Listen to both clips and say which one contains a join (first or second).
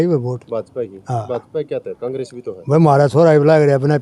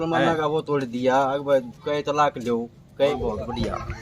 second